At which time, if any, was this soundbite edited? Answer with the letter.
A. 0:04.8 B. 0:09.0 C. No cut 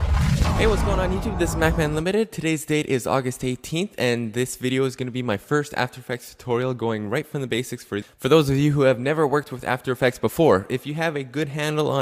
B